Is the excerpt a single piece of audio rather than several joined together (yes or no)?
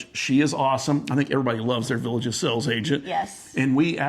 yes